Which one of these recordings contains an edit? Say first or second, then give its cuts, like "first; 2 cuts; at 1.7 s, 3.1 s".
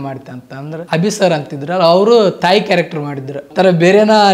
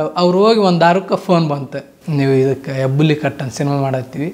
first; 2 cuts; at 0.8 s, 3.4 s